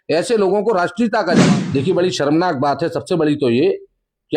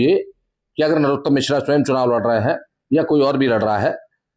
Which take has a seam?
first; 1 cut; at 1.4 s

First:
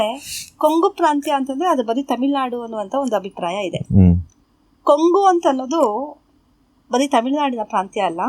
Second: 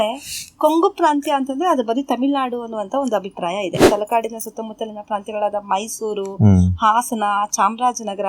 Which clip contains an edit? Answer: second; 1 cut; at 3.8 s

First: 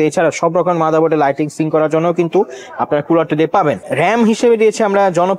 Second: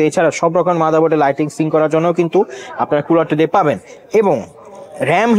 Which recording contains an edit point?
first; 1 cut; at 3.8 s

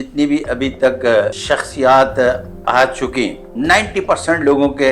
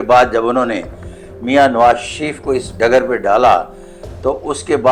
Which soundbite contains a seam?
first; 2 cuts; at 1.4 s, 3.4 s

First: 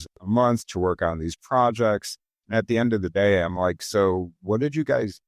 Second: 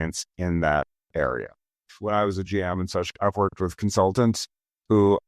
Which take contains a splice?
second; 2 cuts; at 1.8 s, 3.8 s

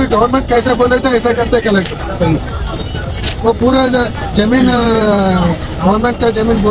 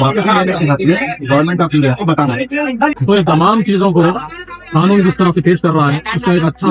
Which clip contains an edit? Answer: second; 1 cut; at 3.0 s

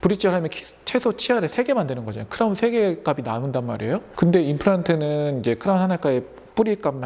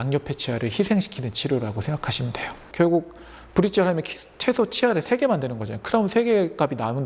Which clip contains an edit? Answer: second; 1 cut; at 2.6 s

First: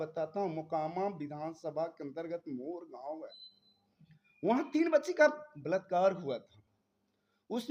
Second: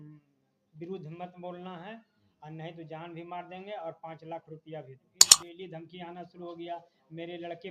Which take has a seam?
second; 1 cut; at 5.4 s

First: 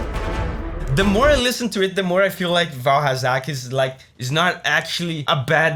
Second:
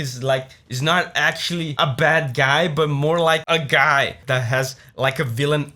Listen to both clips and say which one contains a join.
second; 1 cut; at 4.2 s

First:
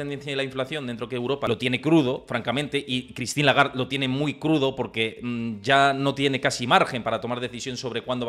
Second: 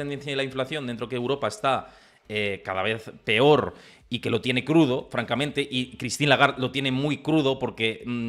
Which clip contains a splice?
first; 1 cut; at 1.5 s

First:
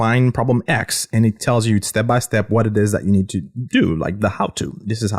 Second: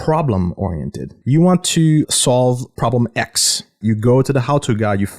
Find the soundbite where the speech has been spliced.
second; 3 cuts; at 1.1 s, 2.7 s, 3.8 s

